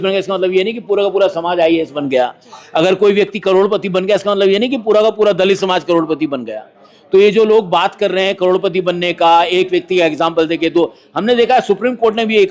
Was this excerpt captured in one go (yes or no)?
yes